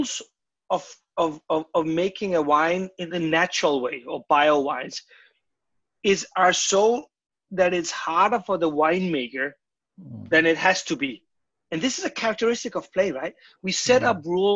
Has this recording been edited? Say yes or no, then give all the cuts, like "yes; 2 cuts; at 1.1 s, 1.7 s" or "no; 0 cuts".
no; 0 cuts